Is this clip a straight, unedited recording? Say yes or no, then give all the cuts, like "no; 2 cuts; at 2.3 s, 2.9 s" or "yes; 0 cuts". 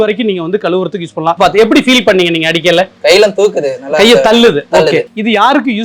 no; 2 cuts; at 1.4 s, 5.0 s